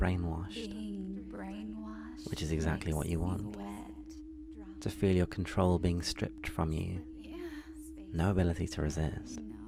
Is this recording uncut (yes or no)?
yes